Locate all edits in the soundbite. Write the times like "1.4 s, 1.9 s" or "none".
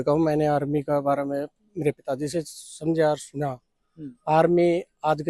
none